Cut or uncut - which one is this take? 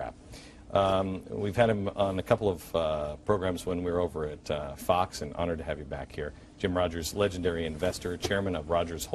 uncut